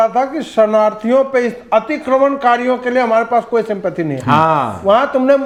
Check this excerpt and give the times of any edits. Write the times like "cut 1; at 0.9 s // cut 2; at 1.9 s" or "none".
none